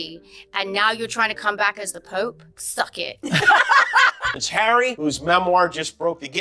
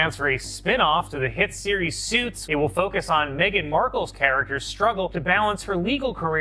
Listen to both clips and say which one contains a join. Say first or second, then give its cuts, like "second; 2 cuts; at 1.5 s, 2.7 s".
first; 1 cut; at 4.1 s